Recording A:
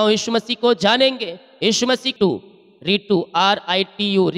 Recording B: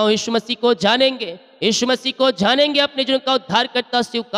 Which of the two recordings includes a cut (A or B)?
A